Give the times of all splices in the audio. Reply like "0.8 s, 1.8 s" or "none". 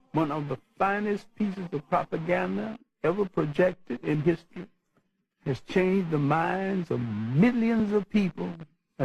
none